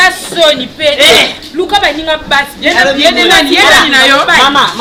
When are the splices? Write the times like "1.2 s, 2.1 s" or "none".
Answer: none